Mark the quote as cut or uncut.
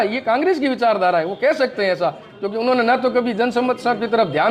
uncut